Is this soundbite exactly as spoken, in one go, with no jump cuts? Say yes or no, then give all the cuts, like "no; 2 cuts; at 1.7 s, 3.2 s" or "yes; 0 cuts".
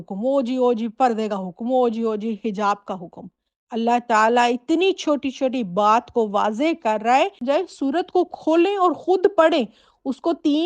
no; 1 cut; at 7.4 s